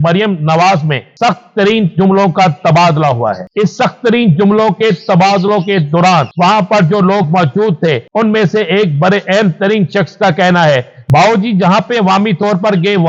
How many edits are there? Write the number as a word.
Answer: five